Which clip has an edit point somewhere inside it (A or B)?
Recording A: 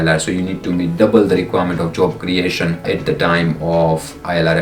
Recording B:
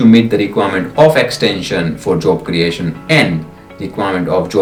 A